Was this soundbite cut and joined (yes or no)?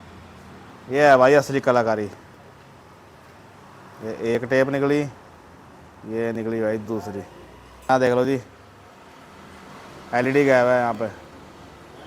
yes